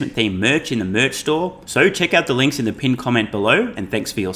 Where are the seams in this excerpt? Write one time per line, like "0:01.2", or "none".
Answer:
0:01.6